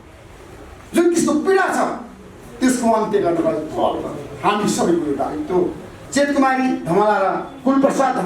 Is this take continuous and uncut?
no; 1 cut; at 5.9 s

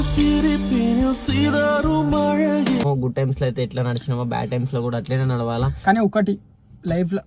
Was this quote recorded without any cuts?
no; 1 cut; at 2.8 s

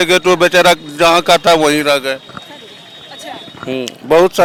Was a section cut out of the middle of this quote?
no; 0 cuts

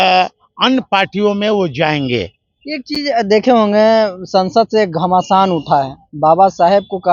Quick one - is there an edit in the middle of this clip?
no; 0 cuts

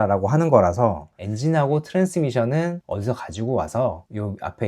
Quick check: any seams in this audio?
yes; 1 cut; at 1.1 s

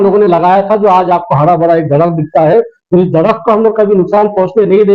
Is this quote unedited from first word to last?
yes; 0 cuts

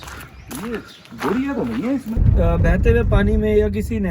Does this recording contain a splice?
yes; 1 cut; at 2.2 s

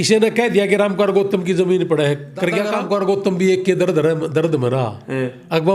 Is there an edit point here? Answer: yes; 1 cut; at 2.7 s

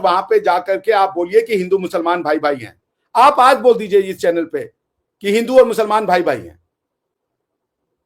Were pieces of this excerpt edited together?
no; 0 cuts

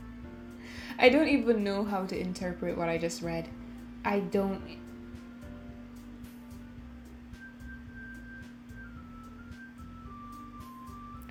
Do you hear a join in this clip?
no; 0 cuts

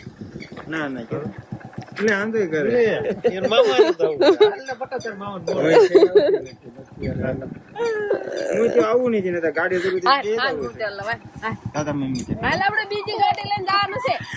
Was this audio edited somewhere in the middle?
no; 0 cuts

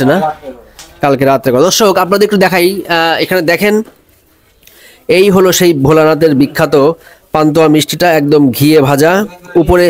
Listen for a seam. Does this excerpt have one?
no; 0 cuts

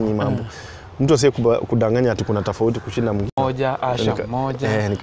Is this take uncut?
no; 1 cut; at 3.4 s

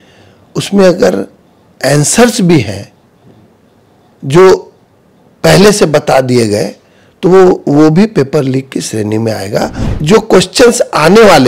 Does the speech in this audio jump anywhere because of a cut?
yes; 1 cut; at 9.8 s

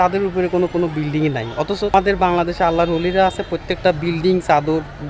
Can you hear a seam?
yes; 1 cut; at 1.9 s

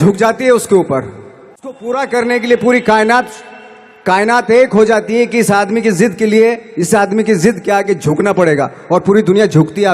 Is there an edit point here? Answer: yes; 1 cut; at 1.8 s

